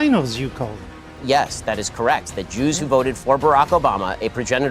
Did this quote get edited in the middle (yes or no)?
yes